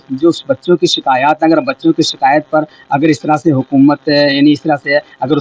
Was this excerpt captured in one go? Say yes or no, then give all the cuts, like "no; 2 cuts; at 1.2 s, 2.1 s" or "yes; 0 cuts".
yes; 0 cuts